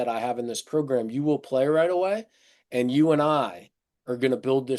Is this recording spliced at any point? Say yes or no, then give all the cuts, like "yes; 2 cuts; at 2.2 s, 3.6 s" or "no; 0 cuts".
no; 0 cuts